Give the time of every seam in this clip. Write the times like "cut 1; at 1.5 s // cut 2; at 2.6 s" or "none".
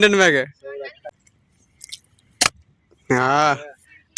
cut 1; at 1.1 s